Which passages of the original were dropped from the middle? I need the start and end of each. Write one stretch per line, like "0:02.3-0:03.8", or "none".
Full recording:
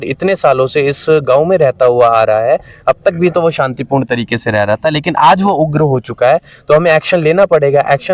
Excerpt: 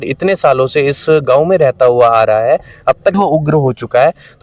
0:03.1-0:05.4